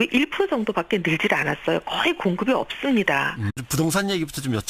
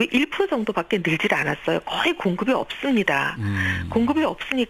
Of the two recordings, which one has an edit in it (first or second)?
second